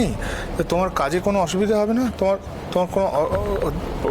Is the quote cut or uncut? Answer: uncut